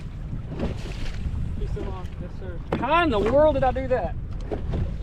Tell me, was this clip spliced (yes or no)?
no